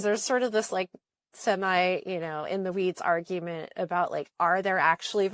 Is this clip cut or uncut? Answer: cut